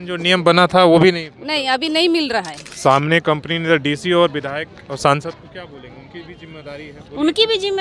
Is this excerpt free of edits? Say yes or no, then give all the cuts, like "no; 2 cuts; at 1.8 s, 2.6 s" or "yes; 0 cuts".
no; 1 cut; at 2.6 s